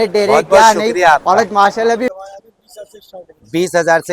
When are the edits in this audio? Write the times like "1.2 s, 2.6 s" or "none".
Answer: 2.1 s